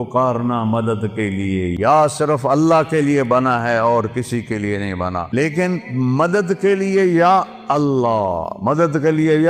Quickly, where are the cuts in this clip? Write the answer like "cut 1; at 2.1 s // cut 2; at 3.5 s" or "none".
cut 1; at 1.7 s // cut 2; at 5.3 s